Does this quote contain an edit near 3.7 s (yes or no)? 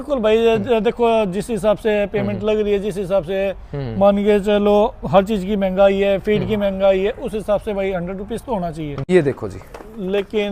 no